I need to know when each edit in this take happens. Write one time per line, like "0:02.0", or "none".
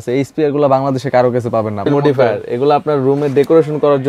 0:01.9